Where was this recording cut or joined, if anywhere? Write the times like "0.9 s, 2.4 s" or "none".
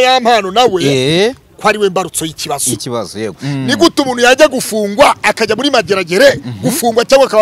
3.4 s